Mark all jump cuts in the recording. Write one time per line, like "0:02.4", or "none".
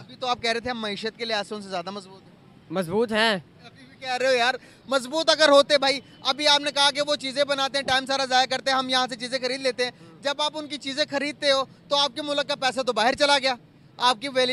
none